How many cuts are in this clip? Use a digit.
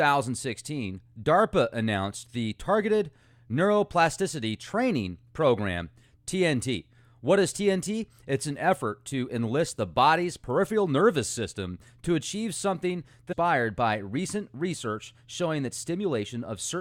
0